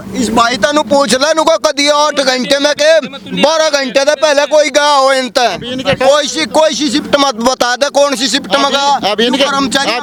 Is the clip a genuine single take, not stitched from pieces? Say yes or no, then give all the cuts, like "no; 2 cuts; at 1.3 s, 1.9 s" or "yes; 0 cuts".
yes; 0 cuts